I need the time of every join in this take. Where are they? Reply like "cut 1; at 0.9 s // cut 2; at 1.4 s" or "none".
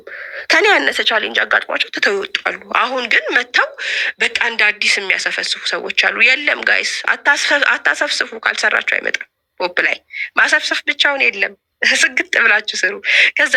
none